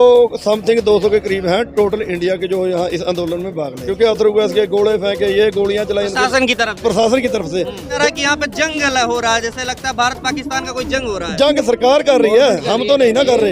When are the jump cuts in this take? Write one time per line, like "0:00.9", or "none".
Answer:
0:03.8
0:08.0